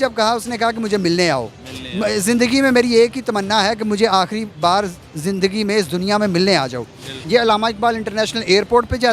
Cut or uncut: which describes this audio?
cut